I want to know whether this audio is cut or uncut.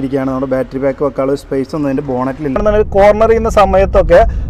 cut